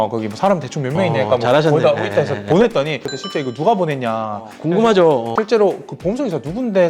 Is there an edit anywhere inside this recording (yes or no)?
yes